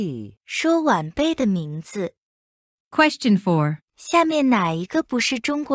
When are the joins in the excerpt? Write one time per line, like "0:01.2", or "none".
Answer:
none